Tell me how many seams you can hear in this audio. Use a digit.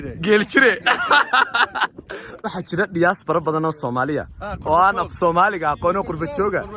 1